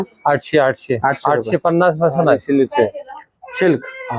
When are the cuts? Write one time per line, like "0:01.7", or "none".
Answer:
0:02.4